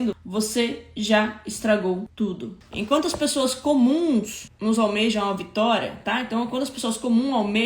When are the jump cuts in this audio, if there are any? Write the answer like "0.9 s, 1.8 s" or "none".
2.5 s